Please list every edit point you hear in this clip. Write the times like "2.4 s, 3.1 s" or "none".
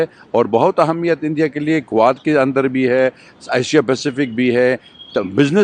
none